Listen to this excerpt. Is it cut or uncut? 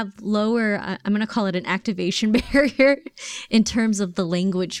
uncut